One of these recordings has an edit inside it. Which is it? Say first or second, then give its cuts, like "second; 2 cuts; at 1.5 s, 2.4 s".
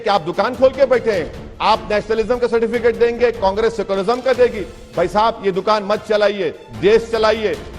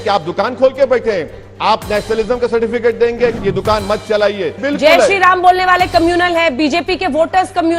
second; 2 cuts; at 3.4 s, 4.6 s